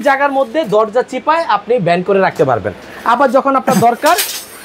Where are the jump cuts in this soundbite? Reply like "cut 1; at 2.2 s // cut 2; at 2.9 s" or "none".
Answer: none